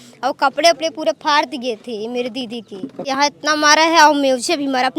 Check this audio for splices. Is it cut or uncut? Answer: cut